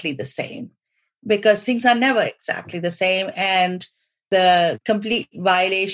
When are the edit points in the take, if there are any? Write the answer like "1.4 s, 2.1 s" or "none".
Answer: 4.2 s, 4.8 s